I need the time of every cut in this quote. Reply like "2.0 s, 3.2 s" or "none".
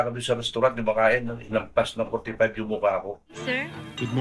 3.3 s